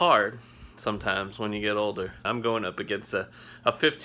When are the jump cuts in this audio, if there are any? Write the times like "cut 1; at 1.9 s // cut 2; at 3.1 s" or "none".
cut 1; at 2.2 s

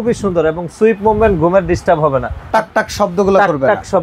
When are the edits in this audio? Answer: cut 1; at 2.4 s

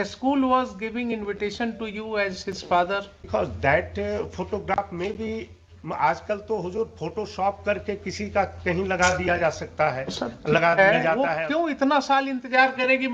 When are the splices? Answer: cut 1; at 3.3 s // cut 2; at 11.3 s

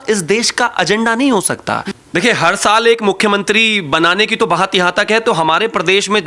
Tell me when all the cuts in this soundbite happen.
cut 1; at 1.9 s

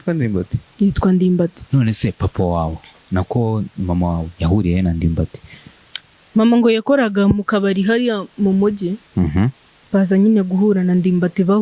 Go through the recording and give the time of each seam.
cut 1; at 1.6 s

